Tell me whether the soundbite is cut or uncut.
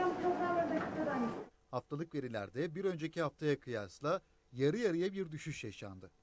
cut